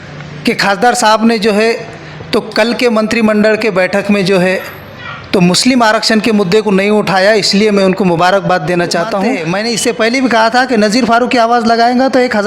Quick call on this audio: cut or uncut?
cut